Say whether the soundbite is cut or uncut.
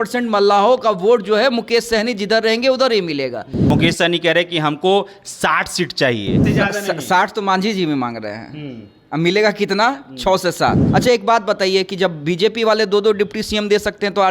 cut